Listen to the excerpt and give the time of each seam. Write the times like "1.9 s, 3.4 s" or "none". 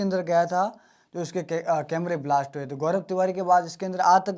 none